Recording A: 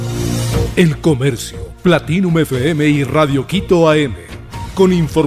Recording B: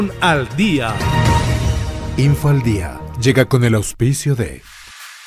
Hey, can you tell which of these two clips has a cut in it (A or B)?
B